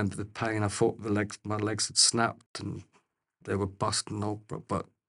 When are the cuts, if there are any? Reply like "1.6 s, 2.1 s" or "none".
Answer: none